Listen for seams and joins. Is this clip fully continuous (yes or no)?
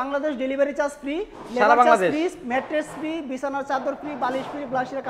yes